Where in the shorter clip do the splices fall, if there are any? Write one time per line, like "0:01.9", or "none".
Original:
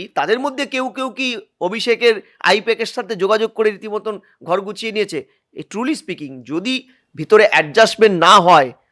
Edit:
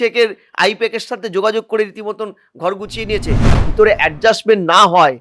0:03.5